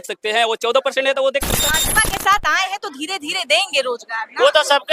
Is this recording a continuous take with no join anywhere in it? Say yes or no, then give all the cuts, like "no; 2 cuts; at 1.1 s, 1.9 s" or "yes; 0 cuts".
no; 1 cut; at 1.8 s